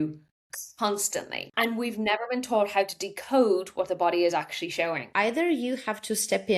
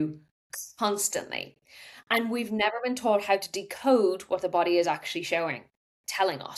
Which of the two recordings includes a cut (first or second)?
first